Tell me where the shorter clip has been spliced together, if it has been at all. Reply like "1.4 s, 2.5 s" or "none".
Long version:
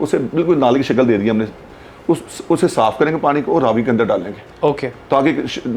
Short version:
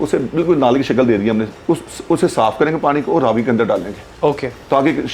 1.5 s